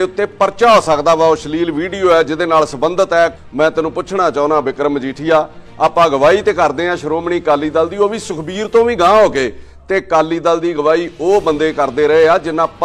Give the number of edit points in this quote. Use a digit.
1